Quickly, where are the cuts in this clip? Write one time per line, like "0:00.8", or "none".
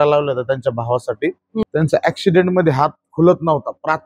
0:01.6